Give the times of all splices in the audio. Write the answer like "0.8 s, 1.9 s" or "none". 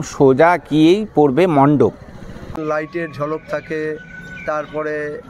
2.5 s